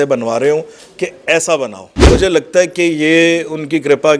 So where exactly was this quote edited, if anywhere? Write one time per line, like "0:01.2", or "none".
0:02.1